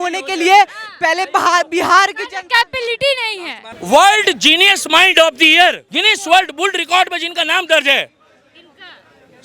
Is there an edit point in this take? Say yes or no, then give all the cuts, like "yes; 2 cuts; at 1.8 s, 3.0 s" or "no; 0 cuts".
yes; 1 cut; at 3.7 s